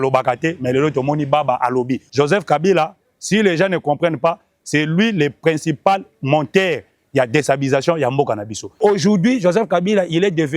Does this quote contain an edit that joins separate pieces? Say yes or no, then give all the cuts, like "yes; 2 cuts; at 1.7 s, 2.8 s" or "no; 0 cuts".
yes; 2 cuts; at 2.0 s, 8.8 s